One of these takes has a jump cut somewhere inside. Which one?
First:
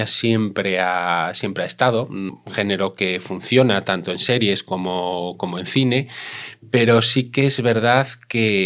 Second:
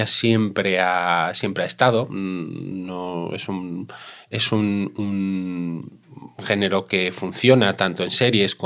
first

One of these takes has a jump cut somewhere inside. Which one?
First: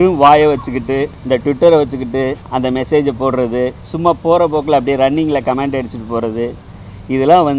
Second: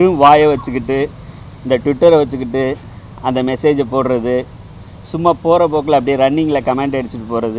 first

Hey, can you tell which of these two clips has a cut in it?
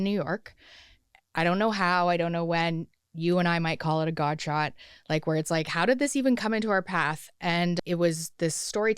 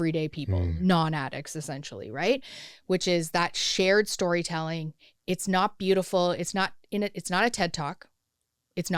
first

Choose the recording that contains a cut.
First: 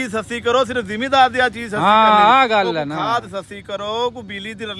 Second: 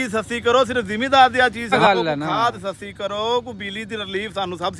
second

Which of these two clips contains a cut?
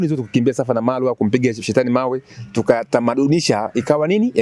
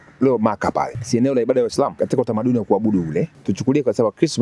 second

